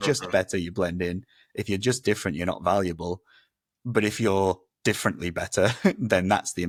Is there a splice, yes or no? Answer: no